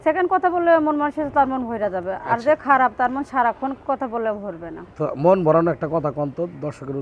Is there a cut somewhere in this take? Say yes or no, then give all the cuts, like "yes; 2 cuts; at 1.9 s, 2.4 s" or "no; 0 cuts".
no; 0 cuts